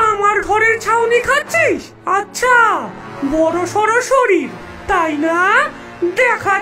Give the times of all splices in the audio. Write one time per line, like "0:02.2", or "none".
0:01.9

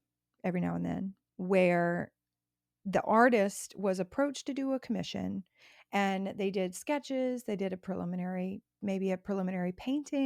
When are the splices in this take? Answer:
0:01.2

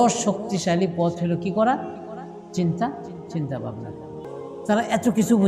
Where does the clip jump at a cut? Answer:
0:04.3

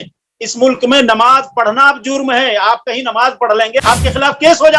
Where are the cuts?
0:03.8

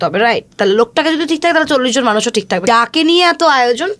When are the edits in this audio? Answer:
0:02.6

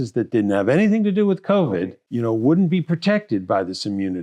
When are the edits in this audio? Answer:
0:02.0

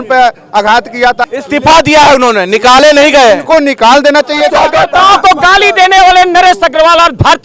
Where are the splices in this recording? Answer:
0:01.4
0:04.6

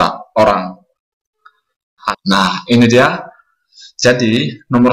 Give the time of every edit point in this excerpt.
0:02.1

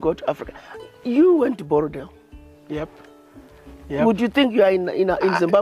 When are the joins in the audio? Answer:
none

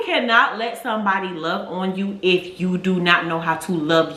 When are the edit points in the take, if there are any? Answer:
none

